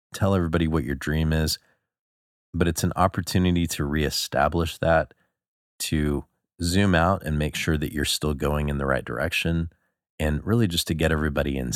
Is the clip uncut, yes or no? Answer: no